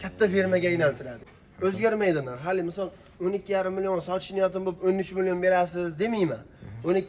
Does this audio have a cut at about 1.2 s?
yes; 1 cut; at 1.2 s

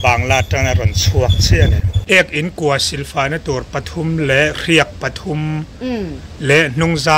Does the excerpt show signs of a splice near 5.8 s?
no; 1 cut; at 1.9 s

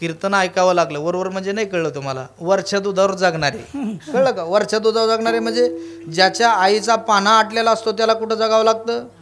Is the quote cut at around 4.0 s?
yes; 1 cut; at 4.0 s

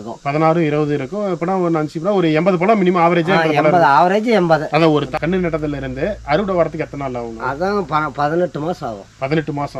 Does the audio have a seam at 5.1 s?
yes; 1 cut; at 5.1 s

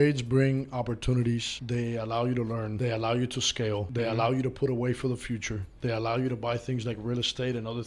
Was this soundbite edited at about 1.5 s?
yes; 3 cuts; at 1.5 s, 2.7 s, 3.9 s

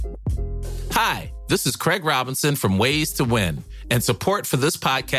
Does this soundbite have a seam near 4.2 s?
no; 1 cut; at 0.9 s

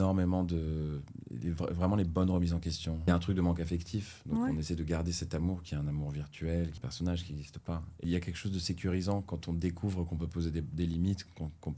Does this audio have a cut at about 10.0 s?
no; 3 cuts; at 3.1 s, 6.8 s, 8.0 s

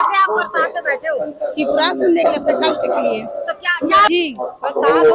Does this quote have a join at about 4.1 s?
yes; 1 cut; at 4.1 s

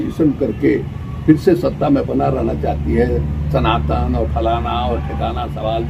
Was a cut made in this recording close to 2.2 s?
no; 0 cuts

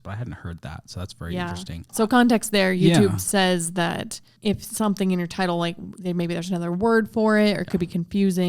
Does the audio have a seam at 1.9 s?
yes; 1 cut; at 1.9 s

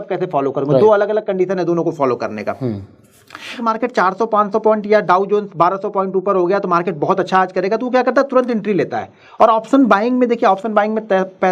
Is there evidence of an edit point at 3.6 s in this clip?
yes; 1 cut; at 3.6 s

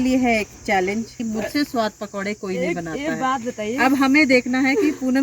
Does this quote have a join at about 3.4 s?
no; 1 cut; at 1.2 s

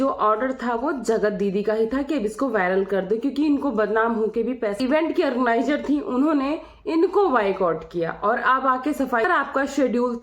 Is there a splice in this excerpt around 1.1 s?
no; 2 cuts; at 4.8 s, 9.2 s

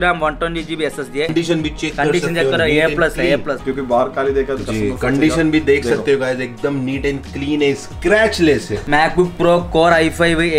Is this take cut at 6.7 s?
no; 3 cuts; at 1.3 s, 3.6 s, 8.8 s

